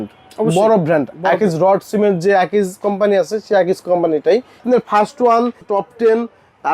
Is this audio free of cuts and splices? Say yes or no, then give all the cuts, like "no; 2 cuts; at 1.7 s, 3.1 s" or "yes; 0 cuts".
no; 2 cuts; at 4.6 s, 5.6 s